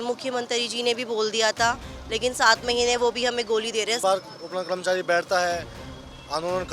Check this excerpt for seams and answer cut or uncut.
cut